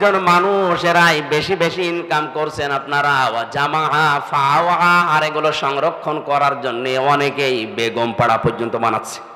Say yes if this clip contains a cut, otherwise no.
no